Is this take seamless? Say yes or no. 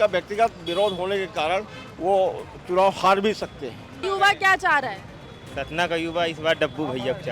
no